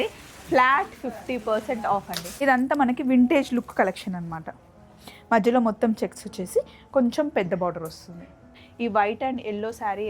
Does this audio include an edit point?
yes; 2 cuts; at 2.2 s, 8.6 s

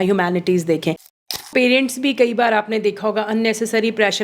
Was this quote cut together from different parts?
yes; 1 cut; at 1.3 s

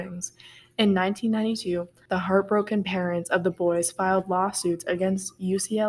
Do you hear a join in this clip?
yes; 1 cut; at 2.0 s

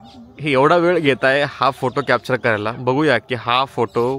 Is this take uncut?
yes; 0 cuts

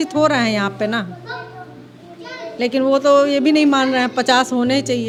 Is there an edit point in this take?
no; 0 cuts

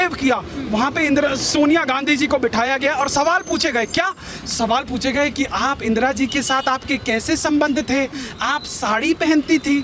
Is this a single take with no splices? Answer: yes; 0 cuts

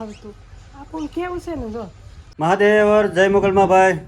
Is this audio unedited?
no; 1 cut; at 2.4 s

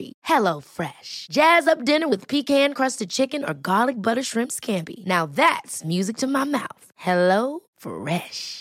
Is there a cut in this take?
no; 0 cuts

